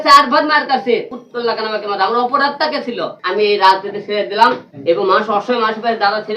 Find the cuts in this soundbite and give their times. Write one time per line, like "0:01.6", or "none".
0:01.1
0:03.2
0:04.7